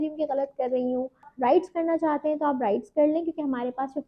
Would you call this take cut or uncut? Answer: cut